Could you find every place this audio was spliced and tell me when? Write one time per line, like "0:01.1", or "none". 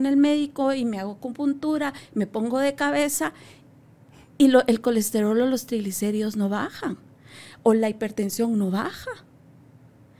none